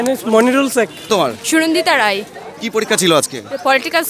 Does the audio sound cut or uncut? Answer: cut